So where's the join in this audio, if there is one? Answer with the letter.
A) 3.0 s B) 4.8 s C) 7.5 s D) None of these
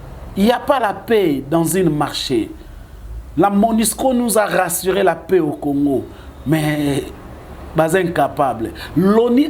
D